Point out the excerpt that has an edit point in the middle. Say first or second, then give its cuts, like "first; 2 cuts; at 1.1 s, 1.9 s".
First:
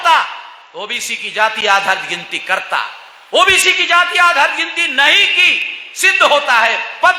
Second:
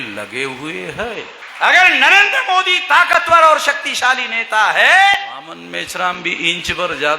second; 2 cuts; at 1.4 s, 5.4 s